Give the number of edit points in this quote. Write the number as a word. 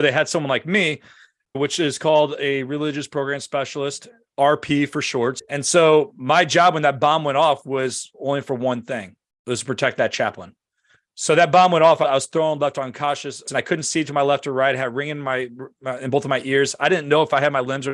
two